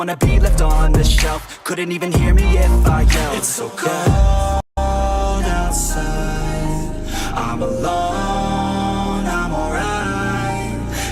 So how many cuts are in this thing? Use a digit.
0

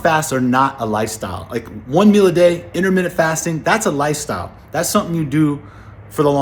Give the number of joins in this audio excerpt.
0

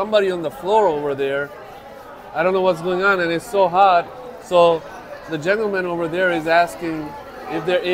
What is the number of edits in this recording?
0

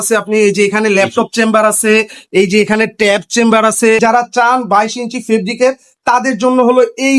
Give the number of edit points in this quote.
1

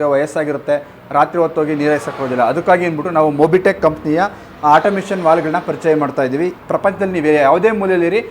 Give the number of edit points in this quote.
1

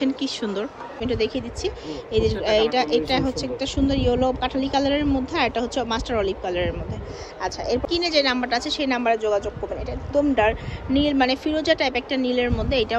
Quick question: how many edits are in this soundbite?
2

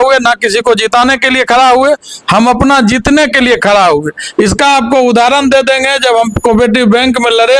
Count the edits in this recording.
0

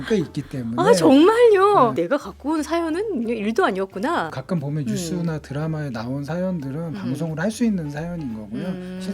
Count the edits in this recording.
2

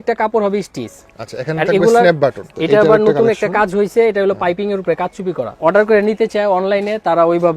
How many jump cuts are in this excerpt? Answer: 2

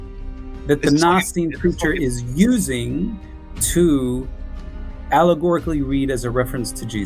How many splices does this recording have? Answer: 1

